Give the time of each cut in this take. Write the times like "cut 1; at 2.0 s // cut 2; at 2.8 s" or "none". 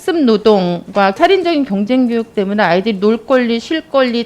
cut 1; at 1.2 s